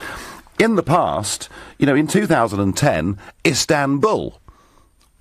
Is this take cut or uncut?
cut